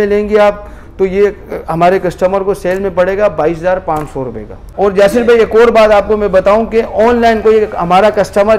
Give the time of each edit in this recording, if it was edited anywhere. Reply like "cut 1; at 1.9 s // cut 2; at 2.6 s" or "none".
cut 1; at 4.6 s

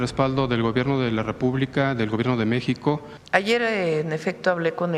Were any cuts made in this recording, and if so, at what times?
cut 1; at 3.1 s

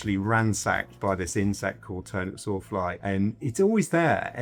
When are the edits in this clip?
none

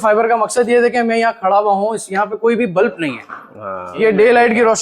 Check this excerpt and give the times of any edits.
cut 1; at 3.9 s

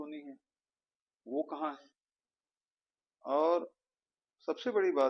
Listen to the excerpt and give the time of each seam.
none

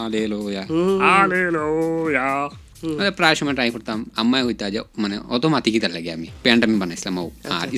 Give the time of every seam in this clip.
cut 1; at 2.6 s // cut 2; at 6.4 s

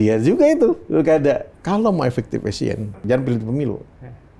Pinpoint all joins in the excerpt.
cut 1; at 1.5 s // cut 2; at 3.0 s

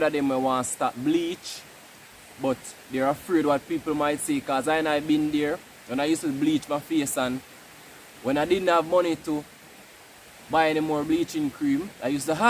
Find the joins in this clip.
none

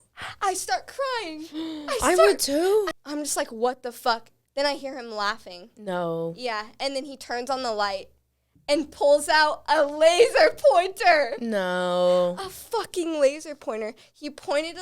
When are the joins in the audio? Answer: none

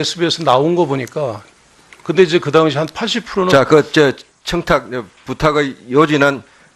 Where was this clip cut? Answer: none

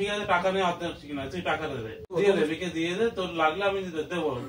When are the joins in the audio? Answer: cut 1; at 2.1 s

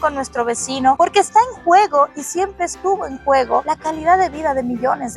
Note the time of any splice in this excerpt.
none

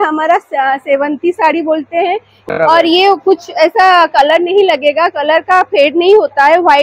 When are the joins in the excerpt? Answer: cut 1; at 2.4 s

